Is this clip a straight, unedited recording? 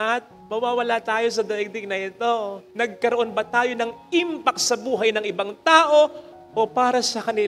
no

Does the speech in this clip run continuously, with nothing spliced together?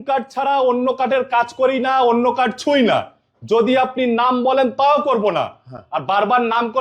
yes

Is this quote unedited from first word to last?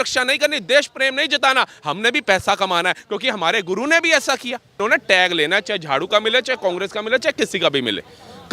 no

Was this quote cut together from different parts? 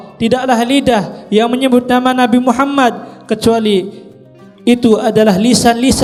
no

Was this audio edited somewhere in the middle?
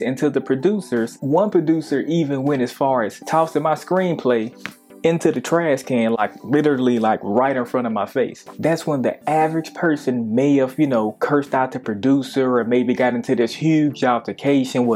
yes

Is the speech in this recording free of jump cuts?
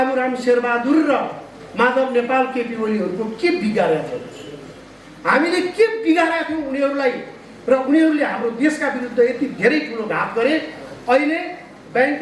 yes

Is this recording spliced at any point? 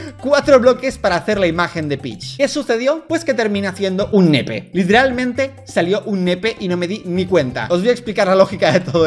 no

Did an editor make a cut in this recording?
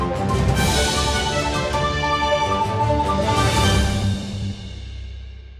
yes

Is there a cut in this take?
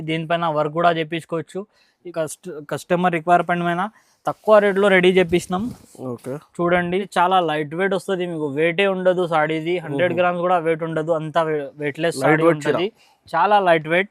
yes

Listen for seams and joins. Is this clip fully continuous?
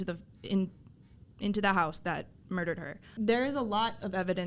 no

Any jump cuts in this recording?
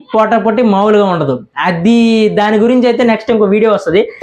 no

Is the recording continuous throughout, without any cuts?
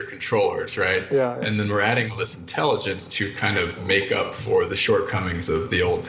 no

